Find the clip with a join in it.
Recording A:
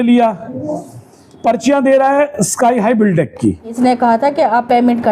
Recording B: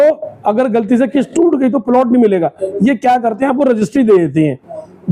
A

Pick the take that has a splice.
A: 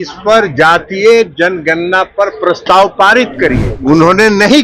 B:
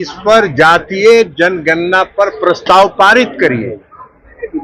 A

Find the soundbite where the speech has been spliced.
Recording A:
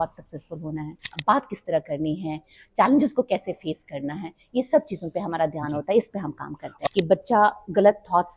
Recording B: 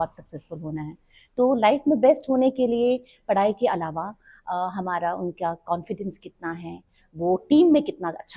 A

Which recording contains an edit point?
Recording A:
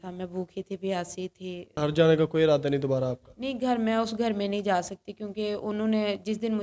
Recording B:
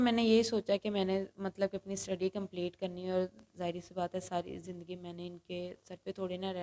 A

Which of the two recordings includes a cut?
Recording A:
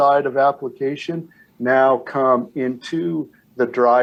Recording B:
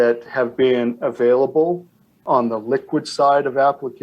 B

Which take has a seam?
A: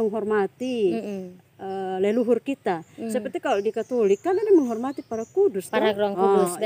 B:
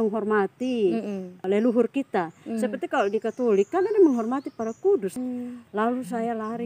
B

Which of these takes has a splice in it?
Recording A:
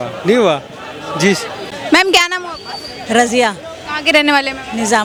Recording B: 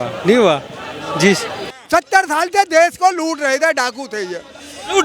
B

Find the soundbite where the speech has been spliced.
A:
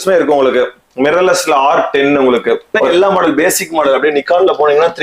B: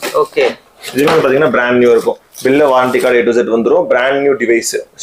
A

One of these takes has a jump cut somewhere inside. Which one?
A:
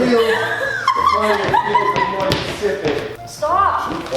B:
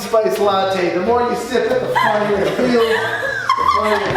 A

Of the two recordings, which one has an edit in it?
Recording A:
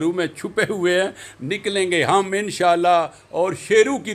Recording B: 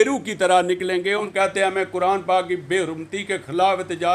B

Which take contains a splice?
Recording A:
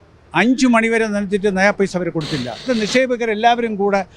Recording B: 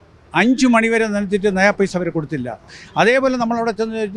A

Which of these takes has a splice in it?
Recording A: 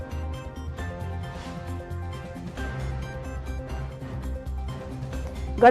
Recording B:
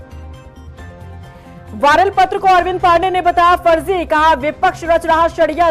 B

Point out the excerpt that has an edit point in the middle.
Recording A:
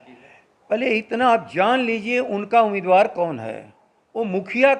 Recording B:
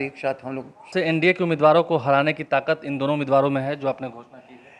B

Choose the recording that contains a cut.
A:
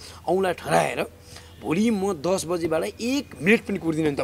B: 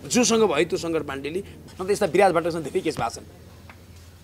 B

